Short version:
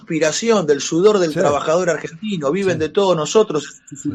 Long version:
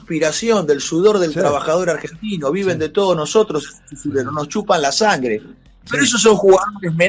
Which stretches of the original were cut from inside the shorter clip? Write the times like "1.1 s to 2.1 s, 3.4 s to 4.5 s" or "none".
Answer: none